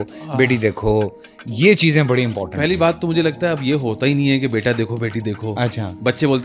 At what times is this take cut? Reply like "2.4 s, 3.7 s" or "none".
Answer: none